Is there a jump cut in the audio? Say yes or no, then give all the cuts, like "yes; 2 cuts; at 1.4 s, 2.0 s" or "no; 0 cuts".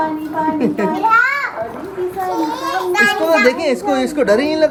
no; 0 cuts